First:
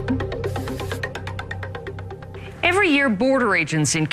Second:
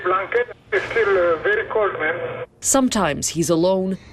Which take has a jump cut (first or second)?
second